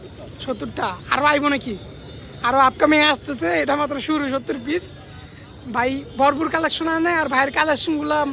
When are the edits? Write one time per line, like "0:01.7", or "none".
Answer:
none